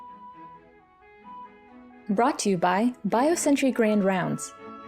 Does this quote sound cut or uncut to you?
cut